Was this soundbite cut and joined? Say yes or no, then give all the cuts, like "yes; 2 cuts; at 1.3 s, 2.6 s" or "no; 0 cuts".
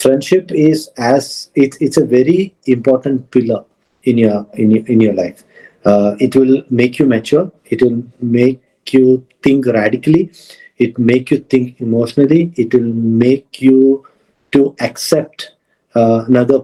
no; 0 cuts